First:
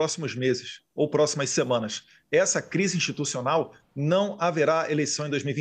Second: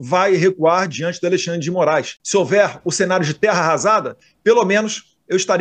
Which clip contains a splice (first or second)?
second